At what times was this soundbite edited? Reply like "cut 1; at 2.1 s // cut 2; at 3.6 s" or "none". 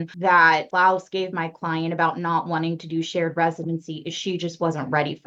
none